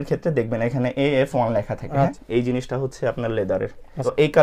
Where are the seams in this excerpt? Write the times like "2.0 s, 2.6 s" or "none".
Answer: none

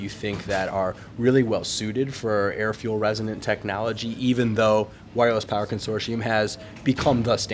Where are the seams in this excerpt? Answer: none

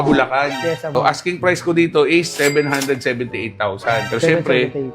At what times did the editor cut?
0.9 s

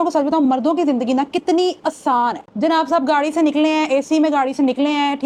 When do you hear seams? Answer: none

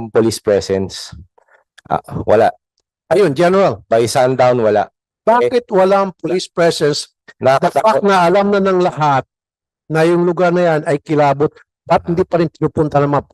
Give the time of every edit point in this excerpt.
5.0 s

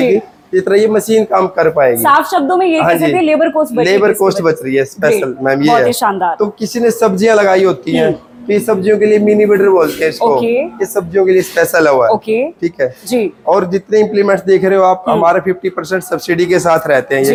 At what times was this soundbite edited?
none

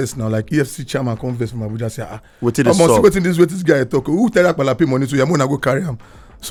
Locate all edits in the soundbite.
none

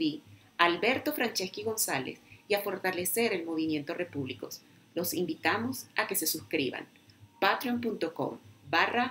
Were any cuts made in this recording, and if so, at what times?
none

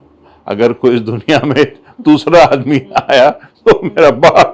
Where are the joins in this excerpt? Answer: none

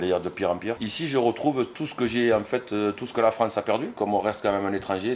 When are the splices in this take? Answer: 0.9 s, 3.9 s

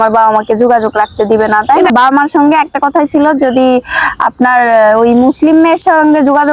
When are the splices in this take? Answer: 2.1 s

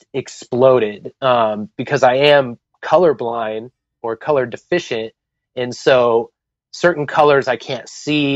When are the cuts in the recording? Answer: none

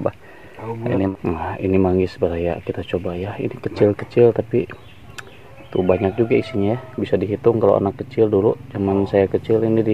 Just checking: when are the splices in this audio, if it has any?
1.1 s

